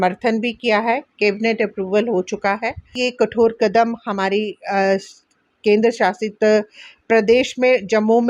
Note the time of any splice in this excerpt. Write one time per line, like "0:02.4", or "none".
0:02.9